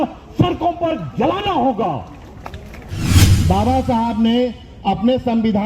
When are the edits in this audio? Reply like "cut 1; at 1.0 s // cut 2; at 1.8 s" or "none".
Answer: cut 1; at 3.3 s